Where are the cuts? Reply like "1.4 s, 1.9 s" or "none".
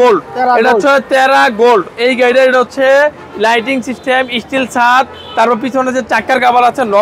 none